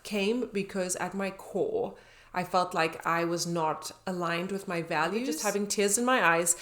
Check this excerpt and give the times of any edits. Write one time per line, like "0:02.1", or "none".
0:05.4